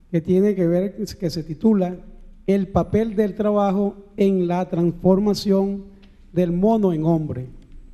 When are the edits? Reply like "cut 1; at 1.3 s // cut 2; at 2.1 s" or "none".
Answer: cut 1; at 2.3 s